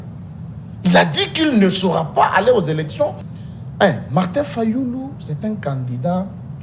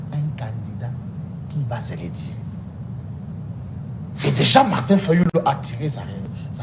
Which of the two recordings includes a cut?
first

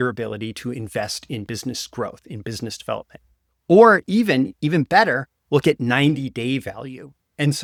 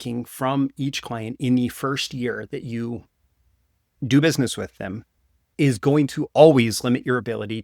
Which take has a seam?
second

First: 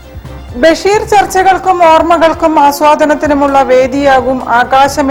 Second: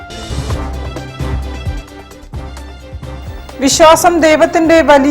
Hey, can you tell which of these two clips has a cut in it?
second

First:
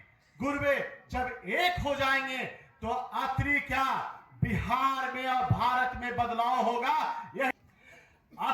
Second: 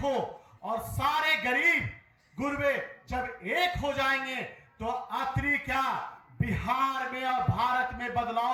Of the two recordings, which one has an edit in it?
first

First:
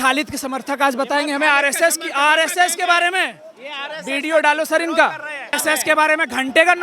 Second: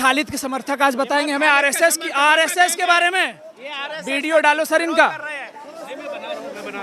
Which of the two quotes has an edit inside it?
first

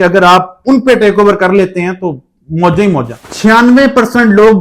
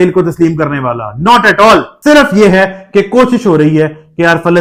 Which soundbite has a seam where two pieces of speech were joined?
first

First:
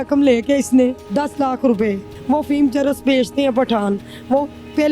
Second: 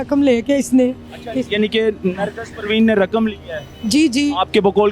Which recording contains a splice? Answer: first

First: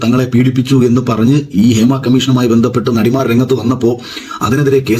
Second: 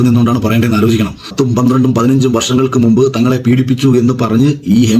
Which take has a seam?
second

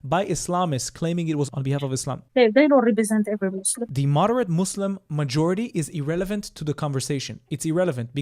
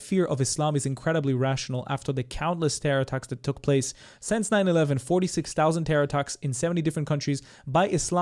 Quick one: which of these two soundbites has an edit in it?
first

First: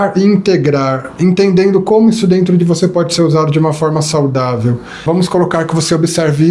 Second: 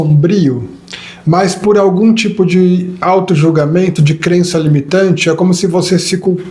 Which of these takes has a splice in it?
first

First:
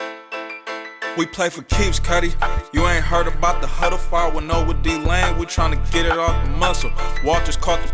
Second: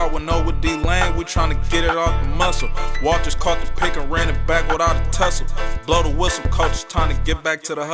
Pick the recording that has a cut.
first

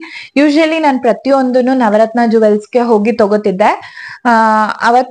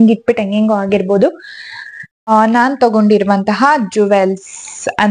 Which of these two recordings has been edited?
second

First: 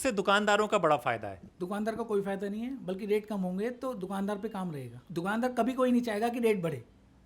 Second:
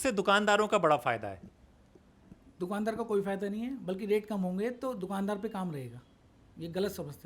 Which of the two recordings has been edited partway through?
first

